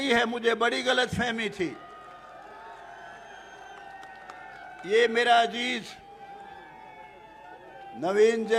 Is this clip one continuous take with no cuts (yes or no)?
yes